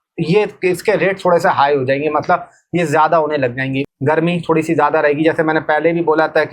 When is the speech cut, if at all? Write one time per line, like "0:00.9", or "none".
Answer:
0:03.8